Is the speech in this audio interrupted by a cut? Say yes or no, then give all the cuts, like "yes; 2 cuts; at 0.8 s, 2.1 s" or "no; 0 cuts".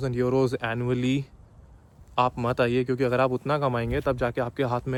no; 0 cuts